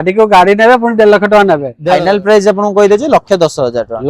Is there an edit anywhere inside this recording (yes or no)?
yes